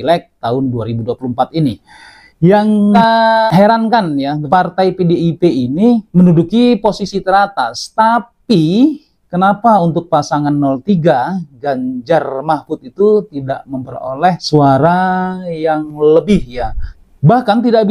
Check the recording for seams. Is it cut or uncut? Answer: uncut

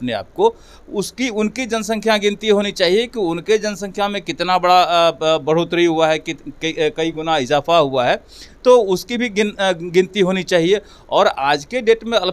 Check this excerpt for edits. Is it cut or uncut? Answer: uncut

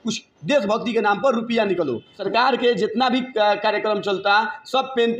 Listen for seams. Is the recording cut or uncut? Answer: cut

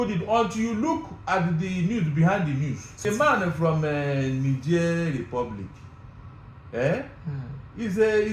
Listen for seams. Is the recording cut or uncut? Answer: cut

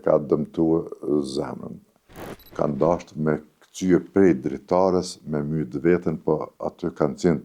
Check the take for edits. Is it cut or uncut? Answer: cut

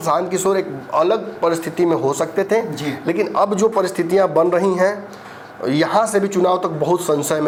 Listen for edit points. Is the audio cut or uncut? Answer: uncut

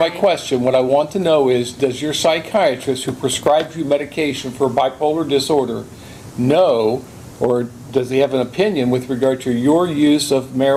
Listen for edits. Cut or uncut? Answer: uncut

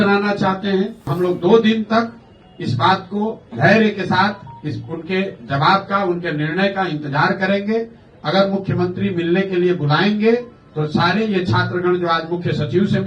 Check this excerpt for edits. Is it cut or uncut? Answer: cut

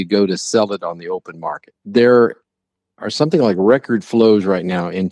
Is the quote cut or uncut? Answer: cut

